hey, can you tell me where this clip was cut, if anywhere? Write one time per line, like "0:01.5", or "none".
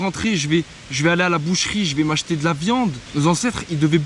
0:03.0